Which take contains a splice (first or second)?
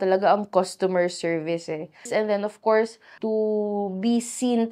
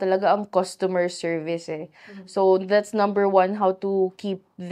first